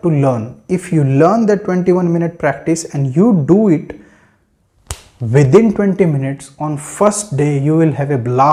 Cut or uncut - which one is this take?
uncut